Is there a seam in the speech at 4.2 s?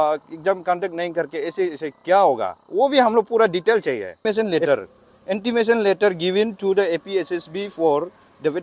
yes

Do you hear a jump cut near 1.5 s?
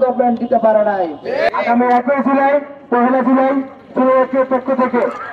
yes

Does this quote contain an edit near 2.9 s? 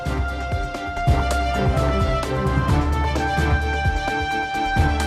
no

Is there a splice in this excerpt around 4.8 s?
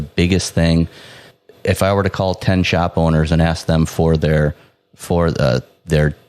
no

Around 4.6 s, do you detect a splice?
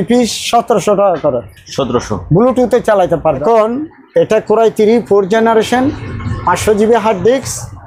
no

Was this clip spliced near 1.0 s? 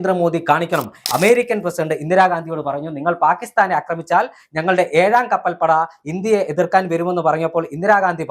yes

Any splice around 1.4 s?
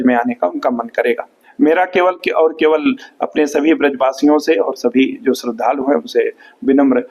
yes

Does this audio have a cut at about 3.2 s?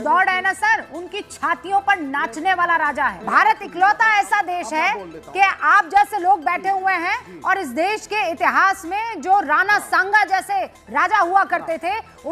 yes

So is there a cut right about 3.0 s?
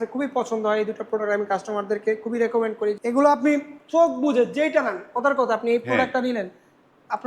yes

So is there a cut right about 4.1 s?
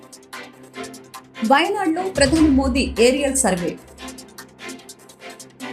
no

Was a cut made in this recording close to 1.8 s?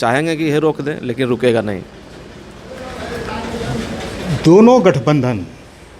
no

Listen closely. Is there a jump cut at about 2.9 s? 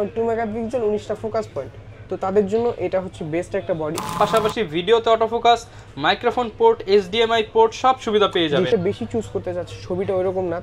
no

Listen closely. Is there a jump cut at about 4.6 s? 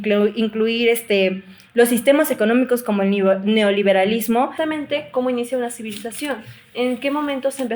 yes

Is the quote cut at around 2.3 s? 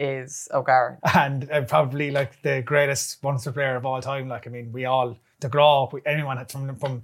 no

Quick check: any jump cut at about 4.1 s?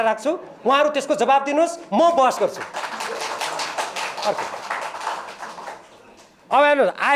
no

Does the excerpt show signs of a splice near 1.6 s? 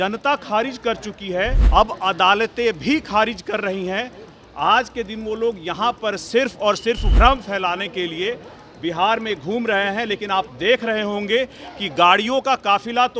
yes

